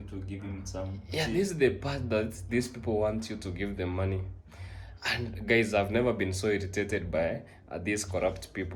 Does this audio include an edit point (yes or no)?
no